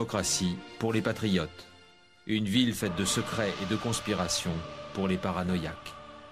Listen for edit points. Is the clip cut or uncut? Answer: cut